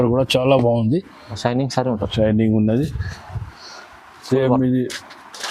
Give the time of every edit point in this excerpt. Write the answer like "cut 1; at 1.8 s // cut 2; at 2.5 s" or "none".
cut 1; at 1.4 s